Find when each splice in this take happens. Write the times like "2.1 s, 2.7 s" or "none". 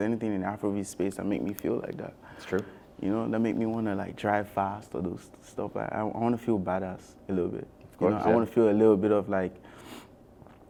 none